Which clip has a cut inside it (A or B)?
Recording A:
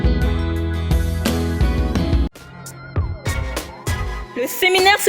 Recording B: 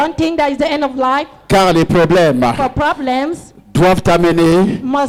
A